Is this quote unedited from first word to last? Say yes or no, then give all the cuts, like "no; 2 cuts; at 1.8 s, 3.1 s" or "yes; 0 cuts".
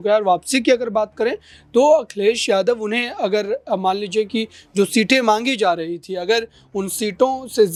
yes; 0 cuts